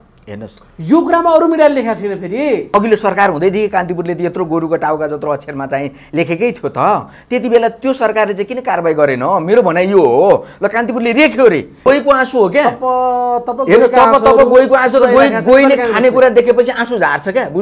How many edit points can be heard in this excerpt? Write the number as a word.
two